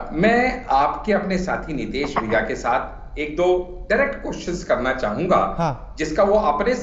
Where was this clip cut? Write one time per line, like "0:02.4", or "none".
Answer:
none